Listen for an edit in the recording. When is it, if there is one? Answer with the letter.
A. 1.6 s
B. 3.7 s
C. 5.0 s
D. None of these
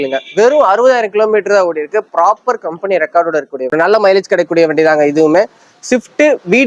B